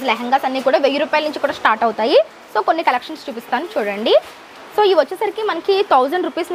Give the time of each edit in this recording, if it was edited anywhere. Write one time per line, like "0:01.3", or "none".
none

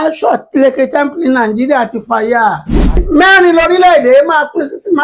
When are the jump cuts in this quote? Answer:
0:03.0

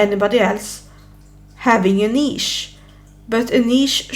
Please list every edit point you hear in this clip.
none

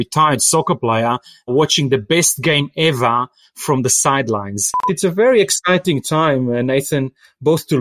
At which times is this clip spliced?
0:01.5
0:04.8

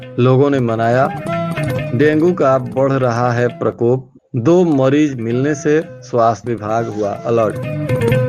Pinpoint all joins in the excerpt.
none

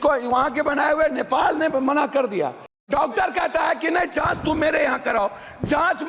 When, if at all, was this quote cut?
0:02.9

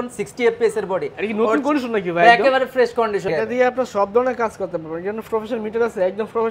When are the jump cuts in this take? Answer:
0:03.3

